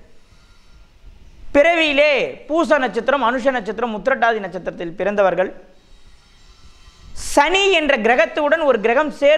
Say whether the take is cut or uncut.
uncut